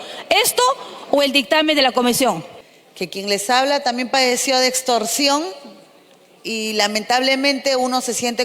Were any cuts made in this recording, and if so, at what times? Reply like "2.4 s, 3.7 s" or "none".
2.5 s

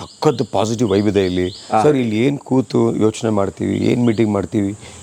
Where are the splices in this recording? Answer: none

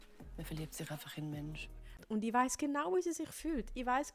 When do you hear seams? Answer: 2.0 s

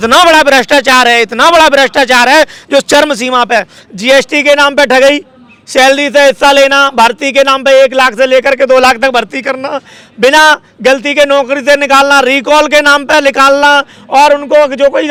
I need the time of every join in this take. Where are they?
none

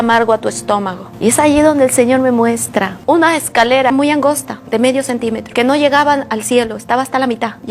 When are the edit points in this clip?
1.0 s, 3.9 s

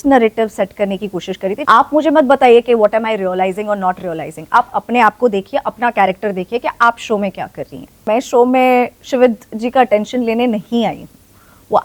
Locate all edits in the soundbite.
1.6 s, 8.1 s

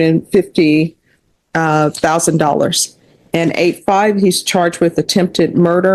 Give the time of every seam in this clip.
none

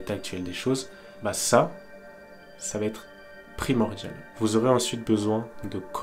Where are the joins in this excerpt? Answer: 1.0 s

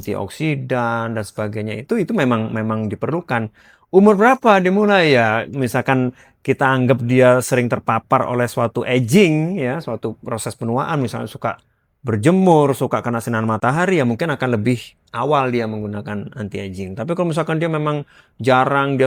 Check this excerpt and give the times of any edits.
none

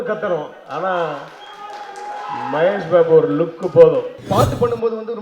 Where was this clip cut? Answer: 4.2 s

